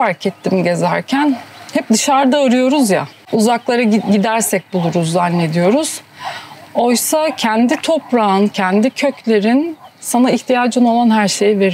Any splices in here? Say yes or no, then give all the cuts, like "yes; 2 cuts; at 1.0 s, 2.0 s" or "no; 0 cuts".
no; 0 cuts